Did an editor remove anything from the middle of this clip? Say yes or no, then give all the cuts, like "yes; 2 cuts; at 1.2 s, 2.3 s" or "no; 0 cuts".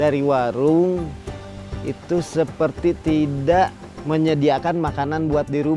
no; 0 cuts